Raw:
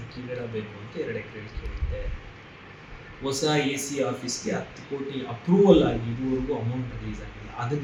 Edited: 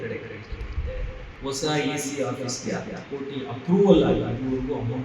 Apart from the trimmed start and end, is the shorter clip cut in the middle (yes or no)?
yes